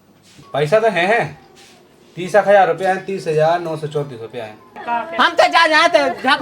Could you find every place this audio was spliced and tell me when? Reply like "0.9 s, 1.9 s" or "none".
4.7 s